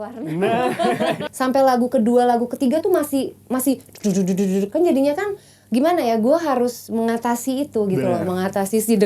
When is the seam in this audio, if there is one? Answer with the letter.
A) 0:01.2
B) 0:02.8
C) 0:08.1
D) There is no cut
A